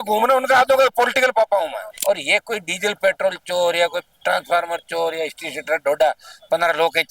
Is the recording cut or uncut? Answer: cut